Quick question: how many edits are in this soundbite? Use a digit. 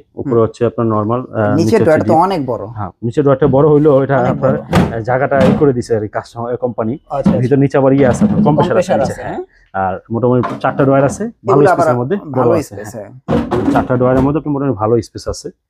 0